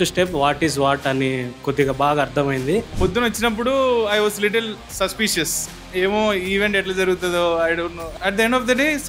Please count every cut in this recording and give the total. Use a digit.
2